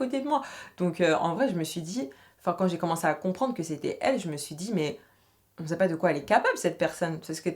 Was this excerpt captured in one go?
yes; 0 cuts

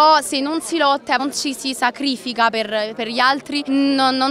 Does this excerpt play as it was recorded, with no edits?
yes; 0 cuts

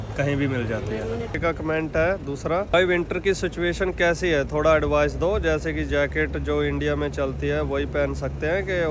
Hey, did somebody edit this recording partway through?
yes; 1 cut; at 1.4 s

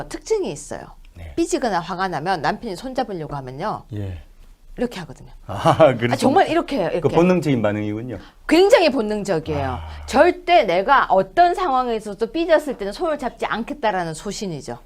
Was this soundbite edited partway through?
yes; 1 cut; at 2.3 s

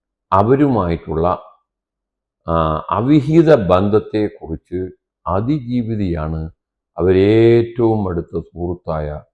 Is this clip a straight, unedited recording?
yes; 0 cuts

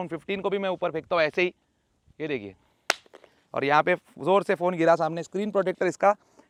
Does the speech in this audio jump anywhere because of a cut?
no; 0 cuts

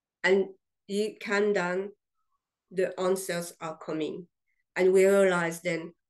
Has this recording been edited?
yes; 1 cut; at 1.2 s

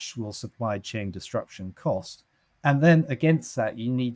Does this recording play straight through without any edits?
yes; 0 cuts

